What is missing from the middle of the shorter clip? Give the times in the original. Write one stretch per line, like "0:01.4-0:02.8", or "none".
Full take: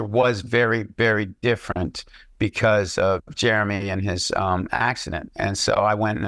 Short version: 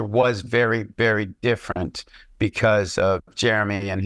none